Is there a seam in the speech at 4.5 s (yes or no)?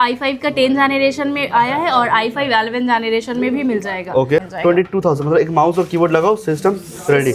yes